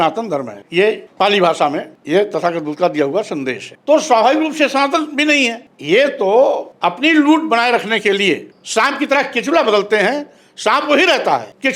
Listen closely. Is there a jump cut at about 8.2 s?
no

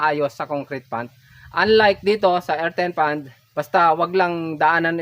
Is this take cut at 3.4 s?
yes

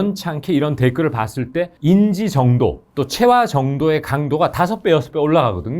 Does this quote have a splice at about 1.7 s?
yes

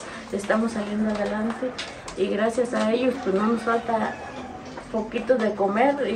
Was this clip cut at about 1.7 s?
no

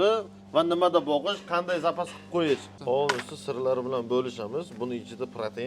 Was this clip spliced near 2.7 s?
yes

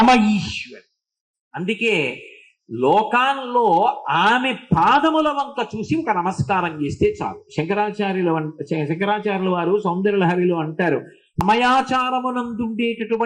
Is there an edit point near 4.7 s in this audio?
no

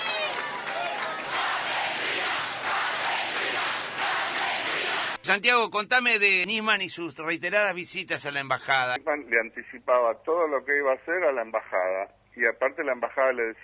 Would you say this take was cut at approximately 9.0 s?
yes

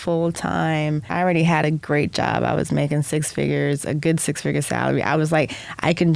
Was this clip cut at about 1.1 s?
yes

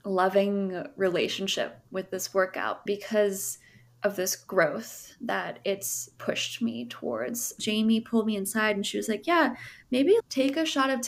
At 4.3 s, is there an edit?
no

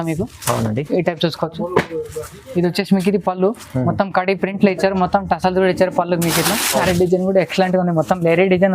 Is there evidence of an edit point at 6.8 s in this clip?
yes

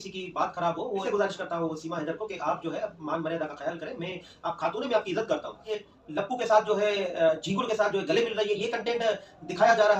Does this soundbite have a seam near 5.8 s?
yes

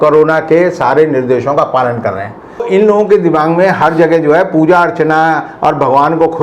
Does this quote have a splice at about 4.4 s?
no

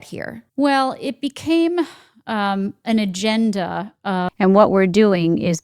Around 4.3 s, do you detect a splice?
yes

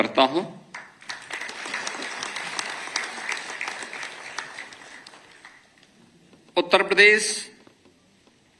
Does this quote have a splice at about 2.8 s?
yes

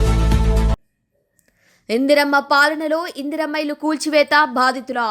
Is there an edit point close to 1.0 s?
no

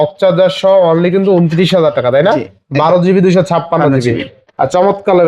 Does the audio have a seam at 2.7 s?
no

